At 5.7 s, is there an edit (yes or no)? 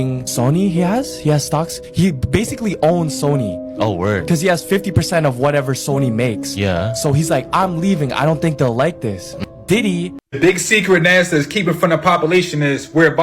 no